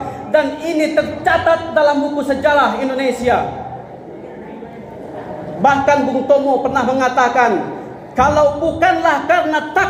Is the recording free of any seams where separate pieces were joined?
yes; 0 cuts

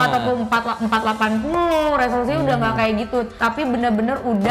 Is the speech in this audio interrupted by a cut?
no; 0 cuts

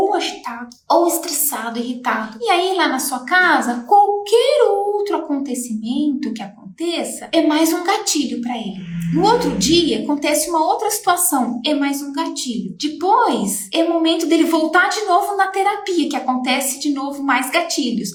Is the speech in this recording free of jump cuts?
yes; 0 cuts

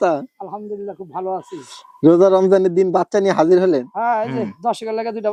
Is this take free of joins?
yes; 0 cuts

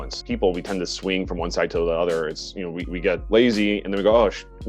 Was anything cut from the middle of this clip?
yes; 1 cut; at 3.2 s

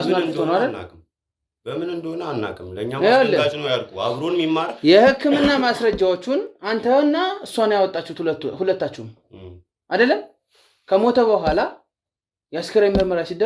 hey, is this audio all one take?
yes; 0 cuts

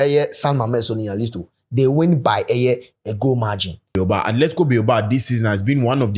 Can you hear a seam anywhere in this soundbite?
yes; 1 cut; at 3.9 s

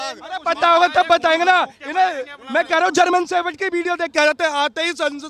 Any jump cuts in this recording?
no; 0 cuts

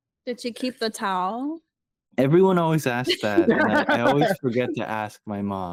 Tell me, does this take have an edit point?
no; 0 cuts

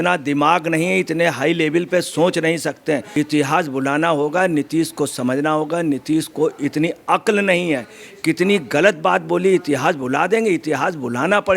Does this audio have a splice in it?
yes; 1 cut; at 3.1 s

